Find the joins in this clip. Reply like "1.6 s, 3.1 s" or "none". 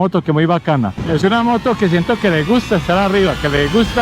1.0 s

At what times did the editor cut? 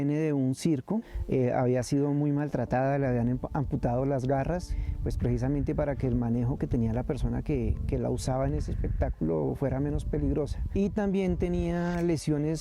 1.1 s, 4.8 s, 10.6 s

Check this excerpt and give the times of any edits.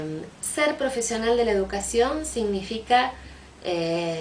1.4 s

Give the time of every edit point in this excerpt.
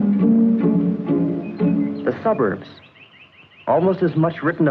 1.2 s

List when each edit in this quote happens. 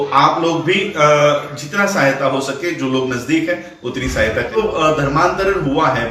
4.6 s

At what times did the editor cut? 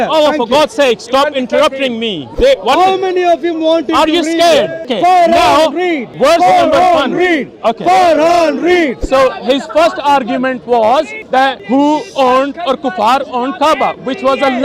2.2 s, 4.9 s, 6.0 s, 9.0 s, 11.4 s

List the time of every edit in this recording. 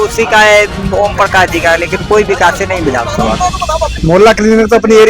3.9 s

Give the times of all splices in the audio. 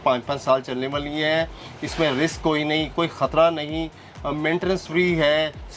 none

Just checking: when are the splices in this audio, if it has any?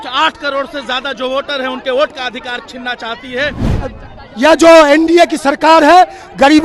3.7 s

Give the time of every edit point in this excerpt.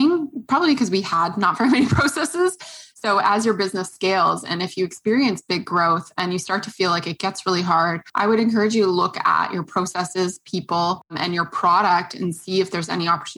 8.0 s, 11.2 s

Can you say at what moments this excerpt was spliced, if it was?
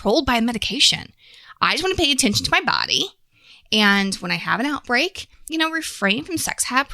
5.4 s

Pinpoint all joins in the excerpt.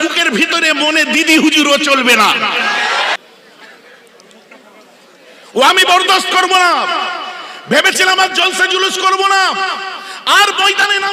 3.1 s

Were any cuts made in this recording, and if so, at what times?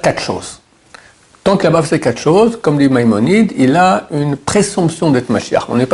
none

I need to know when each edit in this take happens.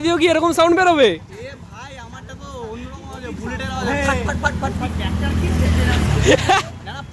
none

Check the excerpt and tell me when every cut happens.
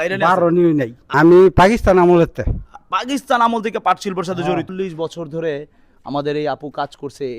1.0 s, 4.7 s

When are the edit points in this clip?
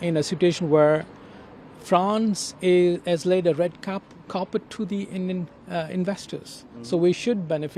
none

